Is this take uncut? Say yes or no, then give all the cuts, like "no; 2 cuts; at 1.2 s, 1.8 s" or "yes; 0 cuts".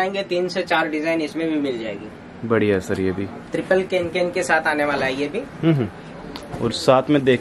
yes; 0 cuts